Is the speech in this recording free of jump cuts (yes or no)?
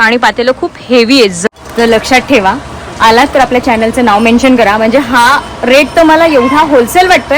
no